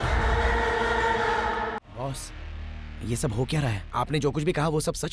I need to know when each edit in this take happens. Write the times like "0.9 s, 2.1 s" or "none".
1.8 s, 3.8 s